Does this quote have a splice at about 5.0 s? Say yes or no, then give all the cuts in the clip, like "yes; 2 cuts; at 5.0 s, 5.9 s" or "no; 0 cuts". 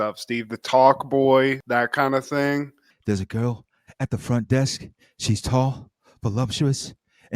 no; 1 cut; at 2.8 s